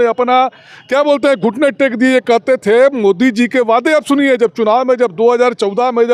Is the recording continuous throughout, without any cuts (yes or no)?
yes